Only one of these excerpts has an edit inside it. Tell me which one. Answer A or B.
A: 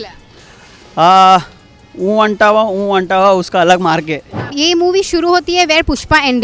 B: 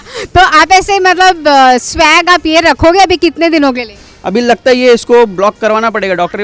A